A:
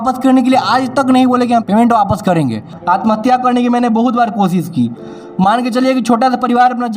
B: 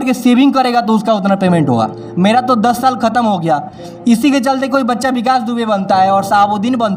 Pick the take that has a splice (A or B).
A